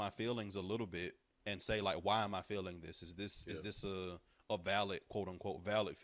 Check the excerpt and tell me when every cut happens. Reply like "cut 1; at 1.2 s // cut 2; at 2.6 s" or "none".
none